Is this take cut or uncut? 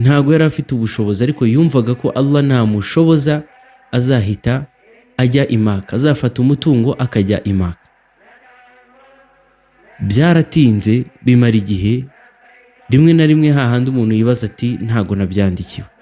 cut